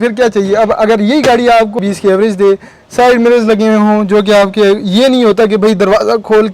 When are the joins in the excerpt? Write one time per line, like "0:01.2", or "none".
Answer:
0:01.8